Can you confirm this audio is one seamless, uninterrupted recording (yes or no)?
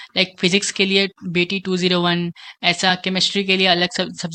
yes